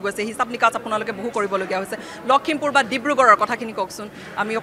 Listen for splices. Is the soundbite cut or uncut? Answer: uncut